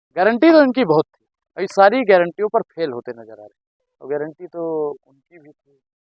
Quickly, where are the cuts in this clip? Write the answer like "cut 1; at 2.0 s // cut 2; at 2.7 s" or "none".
none